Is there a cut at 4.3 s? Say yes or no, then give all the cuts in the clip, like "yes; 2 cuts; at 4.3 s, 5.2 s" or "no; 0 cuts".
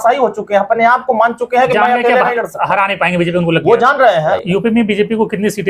yes; 1 cut; at 4.3 s